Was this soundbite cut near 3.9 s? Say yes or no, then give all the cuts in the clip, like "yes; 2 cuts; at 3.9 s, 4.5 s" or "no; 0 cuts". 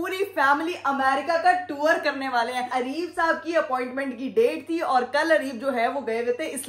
no; 1 cut; at 2.7 s